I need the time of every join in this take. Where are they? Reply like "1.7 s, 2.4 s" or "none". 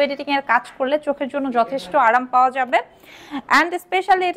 none